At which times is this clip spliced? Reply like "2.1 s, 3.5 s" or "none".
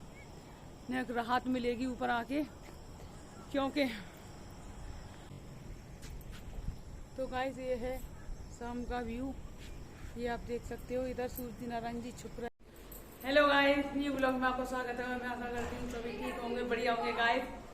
5.3 s, 12.5 s

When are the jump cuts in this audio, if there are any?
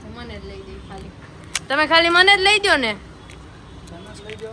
none

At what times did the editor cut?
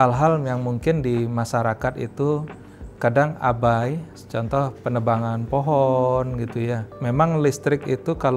4.0 s, 6.9 s

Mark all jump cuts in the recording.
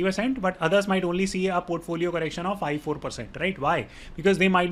none

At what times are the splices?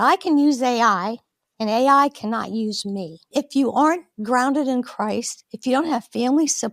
3.2 s

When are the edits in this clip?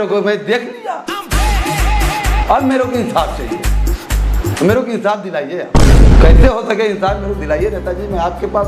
none

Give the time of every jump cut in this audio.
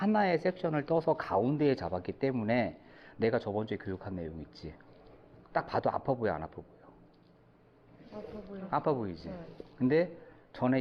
none

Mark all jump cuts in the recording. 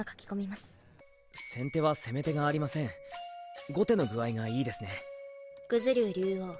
4.7 s

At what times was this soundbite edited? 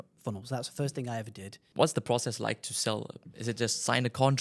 1.7 s

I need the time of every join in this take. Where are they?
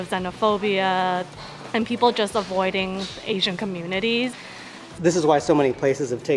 1.4 s, 4.8 s

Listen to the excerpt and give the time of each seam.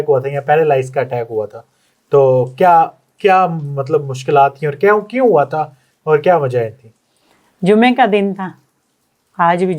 none

